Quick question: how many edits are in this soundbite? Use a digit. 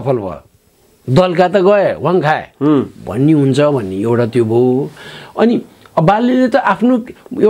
0